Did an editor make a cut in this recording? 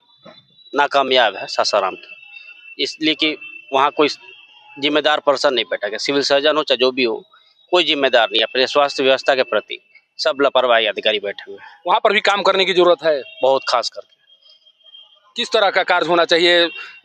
no; 0 cuts

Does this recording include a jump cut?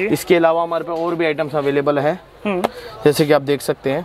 no; 0 cuts

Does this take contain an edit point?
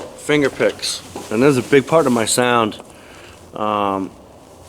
no; 0 cuts

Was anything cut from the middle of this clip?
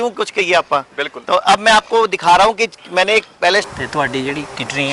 yes; 1 cut; at 3.7 s

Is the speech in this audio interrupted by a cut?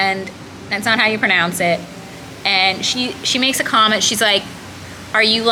no; 0 cuts

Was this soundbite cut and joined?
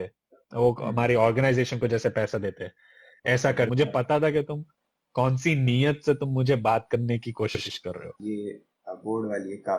yes; 2 cuts; at 3.5 s, 8.1 s

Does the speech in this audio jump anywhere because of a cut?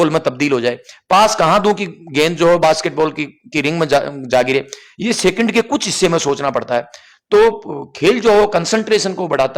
no; 0 cuts

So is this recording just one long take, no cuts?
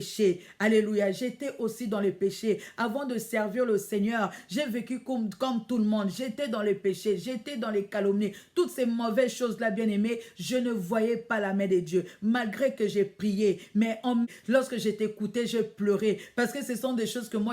no; 1 cut; at 14.3 s

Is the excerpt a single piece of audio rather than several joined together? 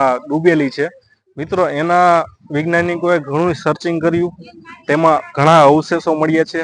yes; 0 cuts

